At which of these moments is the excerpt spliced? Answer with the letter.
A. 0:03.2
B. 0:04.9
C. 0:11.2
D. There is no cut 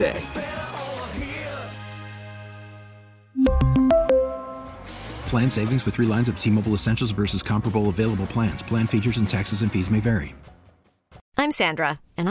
C